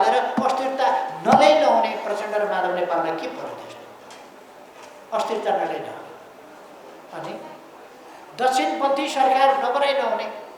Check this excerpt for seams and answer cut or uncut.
uncut